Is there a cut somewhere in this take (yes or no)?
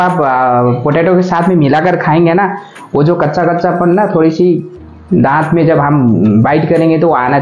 no